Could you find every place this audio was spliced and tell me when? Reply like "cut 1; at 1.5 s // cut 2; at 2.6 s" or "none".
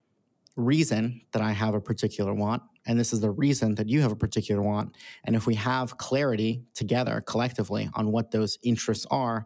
none